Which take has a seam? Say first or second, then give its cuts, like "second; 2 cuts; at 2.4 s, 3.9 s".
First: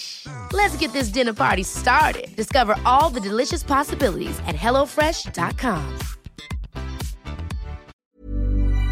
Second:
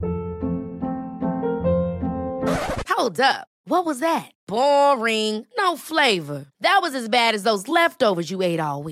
first; 1 cut; at 8.0 s